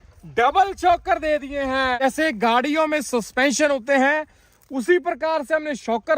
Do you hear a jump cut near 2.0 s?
yes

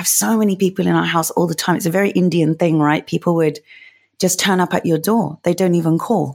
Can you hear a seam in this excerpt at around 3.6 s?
no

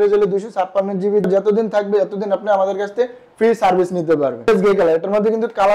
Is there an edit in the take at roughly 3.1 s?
no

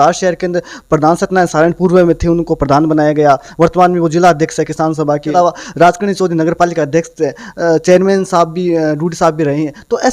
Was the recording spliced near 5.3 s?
yes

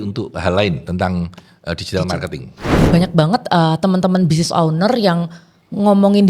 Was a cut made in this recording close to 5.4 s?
no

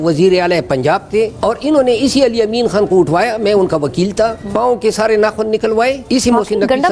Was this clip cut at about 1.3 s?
yes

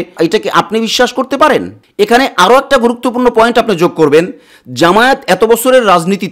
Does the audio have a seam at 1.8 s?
no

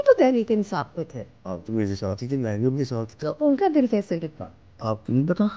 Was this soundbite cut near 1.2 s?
no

